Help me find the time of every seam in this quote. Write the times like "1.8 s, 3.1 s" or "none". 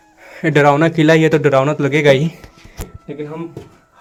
none

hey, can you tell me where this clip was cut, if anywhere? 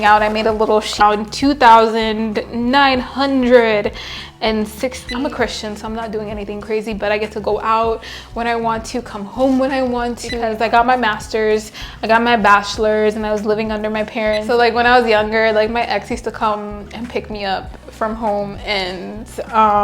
1.0 s, 5.0 s, 10.4 s, 14.4 s

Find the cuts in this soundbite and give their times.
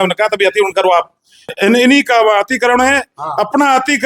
1.5 s

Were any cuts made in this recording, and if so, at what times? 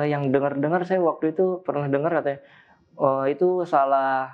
none

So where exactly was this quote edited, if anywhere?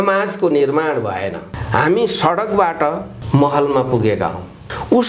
1.4 s

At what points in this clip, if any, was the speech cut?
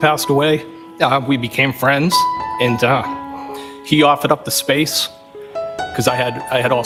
none

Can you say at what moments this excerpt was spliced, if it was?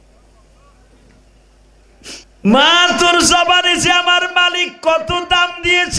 2.3 s

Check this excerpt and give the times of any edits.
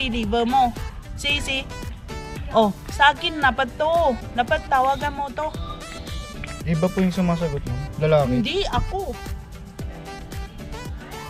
none

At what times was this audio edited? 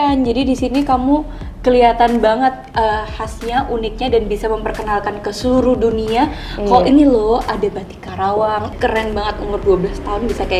8.7 s

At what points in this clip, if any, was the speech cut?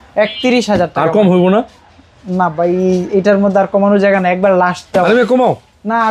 none

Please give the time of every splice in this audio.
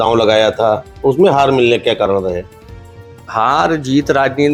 none

